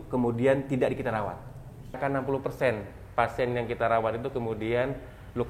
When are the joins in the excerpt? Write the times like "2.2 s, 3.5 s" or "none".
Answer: 2.0 s